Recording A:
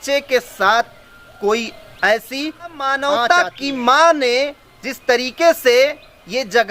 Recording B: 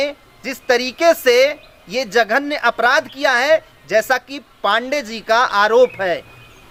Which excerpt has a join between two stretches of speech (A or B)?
A